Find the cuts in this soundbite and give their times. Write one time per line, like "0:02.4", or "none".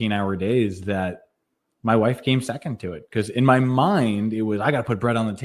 none